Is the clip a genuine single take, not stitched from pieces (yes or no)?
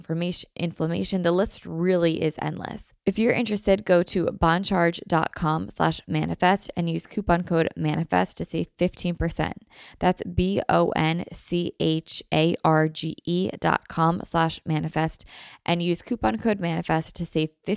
no